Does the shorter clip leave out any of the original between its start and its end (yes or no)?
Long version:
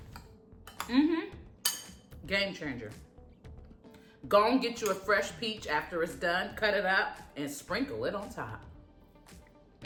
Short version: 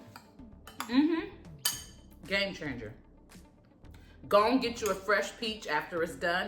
no